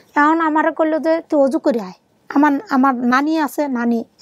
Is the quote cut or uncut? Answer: uncut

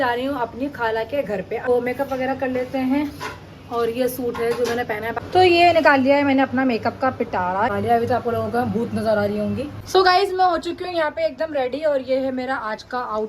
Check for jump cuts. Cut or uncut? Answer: cut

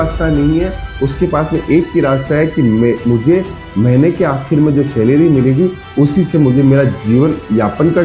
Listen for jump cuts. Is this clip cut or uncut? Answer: uncut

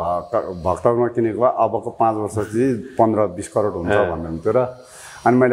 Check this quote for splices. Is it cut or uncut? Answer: uncut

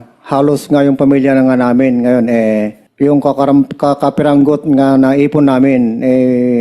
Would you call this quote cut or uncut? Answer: cut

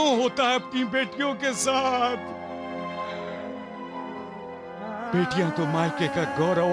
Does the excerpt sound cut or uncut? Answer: uncut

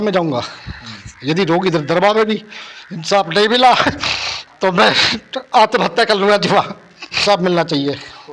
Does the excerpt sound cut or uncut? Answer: cut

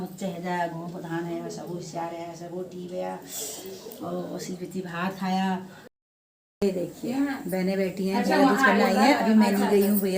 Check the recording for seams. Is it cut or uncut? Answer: cut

